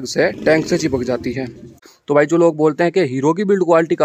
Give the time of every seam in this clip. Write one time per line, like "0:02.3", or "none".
0:01.9